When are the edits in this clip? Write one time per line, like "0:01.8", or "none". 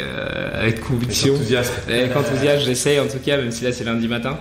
none